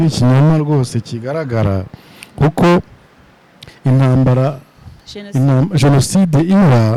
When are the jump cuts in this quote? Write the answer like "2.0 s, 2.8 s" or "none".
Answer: none